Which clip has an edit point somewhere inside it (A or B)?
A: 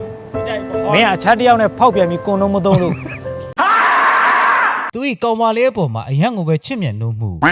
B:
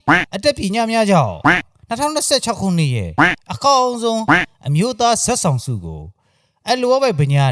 A